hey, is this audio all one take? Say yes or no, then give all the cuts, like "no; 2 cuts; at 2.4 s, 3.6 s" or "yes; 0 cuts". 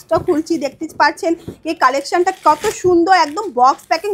yes; 0 cuts